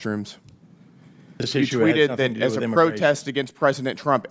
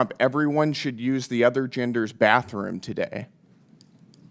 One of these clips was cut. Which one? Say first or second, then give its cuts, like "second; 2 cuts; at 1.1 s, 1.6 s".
first; 1 cut; at 1.5 s